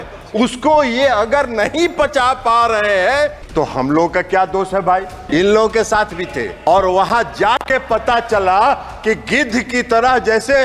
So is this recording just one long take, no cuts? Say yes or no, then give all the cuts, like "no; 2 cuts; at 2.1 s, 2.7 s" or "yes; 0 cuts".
no; 3 cuts; at 3.4 s, 5.1 s, 6.5 s